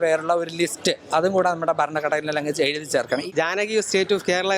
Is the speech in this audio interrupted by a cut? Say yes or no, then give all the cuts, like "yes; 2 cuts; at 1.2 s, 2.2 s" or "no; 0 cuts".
yes; 1 cut; at 3.2 s